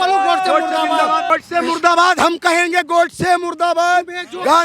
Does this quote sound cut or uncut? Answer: cut